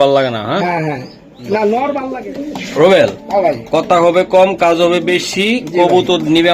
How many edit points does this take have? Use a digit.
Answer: 1